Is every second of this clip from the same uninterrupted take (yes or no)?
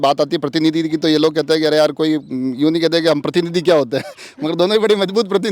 yes